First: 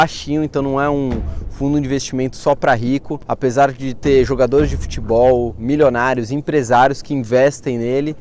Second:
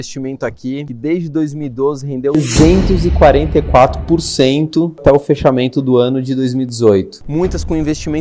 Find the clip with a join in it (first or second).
second